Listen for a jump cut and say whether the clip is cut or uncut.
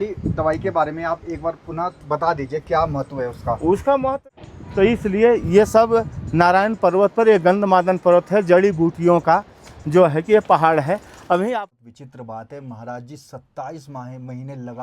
cut